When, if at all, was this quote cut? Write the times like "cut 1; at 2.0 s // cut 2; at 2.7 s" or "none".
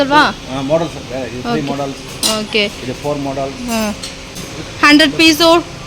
cut 1; at 4.3 s

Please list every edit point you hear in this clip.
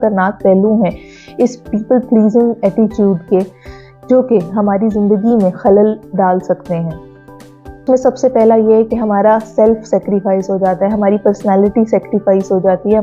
none

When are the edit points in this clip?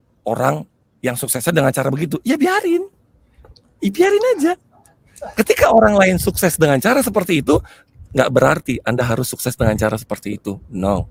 none

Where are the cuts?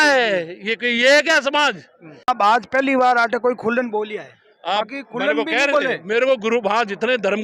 cut 1; at 2.3 s

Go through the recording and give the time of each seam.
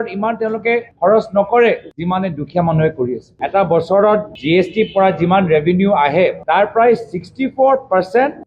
cut 1; at 3.3 s

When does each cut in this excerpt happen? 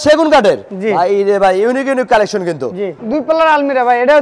cut 1; at 2.9 s

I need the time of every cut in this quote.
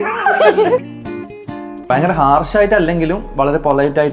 cut 1; at 1.5 s

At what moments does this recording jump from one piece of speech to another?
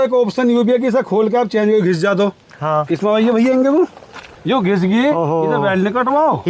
none

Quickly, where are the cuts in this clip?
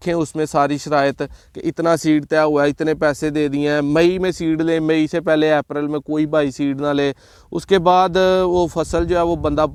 none

